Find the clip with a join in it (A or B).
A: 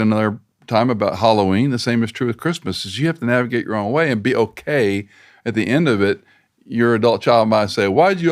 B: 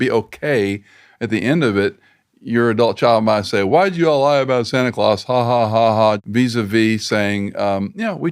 B